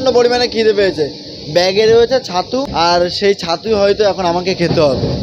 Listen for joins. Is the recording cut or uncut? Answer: cut